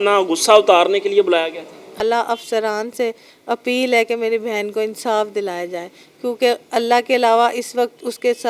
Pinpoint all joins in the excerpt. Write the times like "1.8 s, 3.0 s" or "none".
2.0 s